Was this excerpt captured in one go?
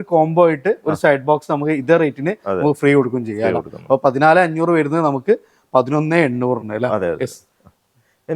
yes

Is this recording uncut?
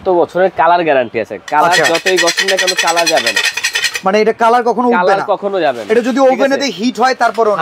yes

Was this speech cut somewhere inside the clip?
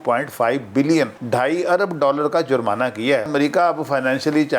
yes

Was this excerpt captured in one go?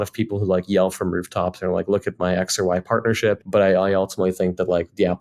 no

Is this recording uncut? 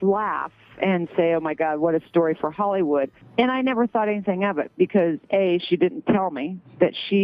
no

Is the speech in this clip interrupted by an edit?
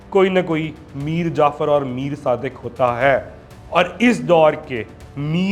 no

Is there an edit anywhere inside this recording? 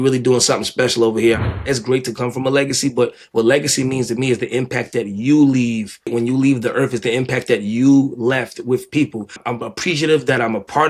yes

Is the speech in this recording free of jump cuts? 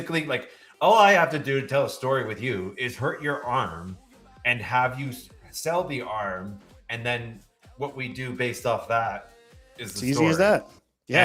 yes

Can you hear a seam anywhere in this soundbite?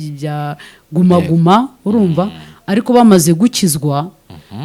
no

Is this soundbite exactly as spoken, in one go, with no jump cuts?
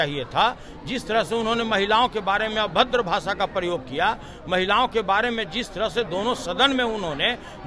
yes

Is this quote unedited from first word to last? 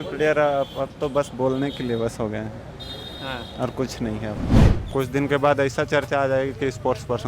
no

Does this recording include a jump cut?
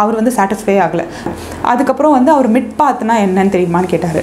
yes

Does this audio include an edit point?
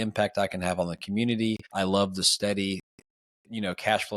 yes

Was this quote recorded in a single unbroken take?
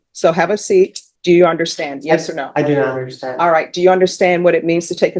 no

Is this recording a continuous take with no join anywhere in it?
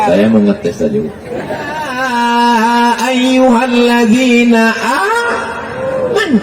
no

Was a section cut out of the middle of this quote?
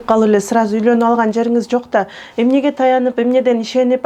no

